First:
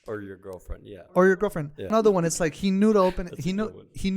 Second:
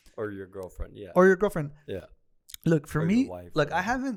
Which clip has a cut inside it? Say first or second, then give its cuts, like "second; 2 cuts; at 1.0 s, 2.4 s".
first; 1 cut; at 1.9 s